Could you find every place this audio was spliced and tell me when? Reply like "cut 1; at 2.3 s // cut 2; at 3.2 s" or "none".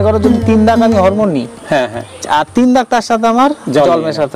none